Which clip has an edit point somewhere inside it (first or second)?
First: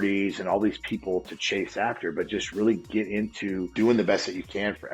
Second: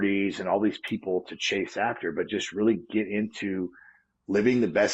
first